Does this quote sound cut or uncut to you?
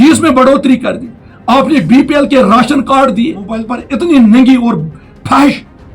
cut